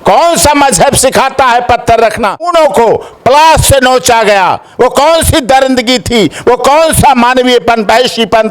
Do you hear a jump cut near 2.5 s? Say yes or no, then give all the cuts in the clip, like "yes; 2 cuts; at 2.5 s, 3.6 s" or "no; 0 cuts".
yes; 1 cut; at 2.5 s